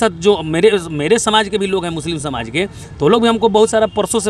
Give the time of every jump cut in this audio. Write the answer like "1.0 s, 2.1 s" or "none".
none